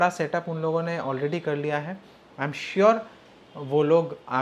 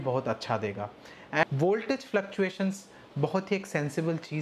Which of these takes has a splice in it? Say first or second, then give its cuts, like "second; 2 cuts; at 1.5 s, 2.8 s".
second; 1 cut; at 1.5 s